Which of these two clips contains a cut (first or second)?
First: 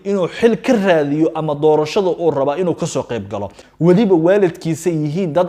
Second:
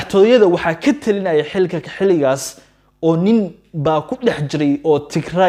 first